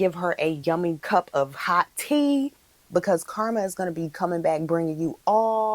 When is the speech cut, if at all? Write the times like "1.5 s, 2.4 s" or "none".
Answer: 0.8 s, 2.6 s